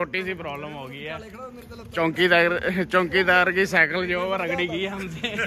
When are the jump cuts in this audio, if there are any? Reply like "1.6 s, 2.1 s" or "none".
none